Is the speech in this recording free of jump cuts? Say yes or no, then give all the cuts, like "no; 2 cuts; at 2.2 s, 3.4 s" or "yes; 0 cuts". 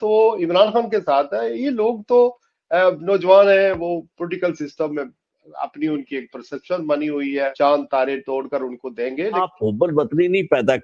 no; 2 cuts; at 7.5 s, 9.4 s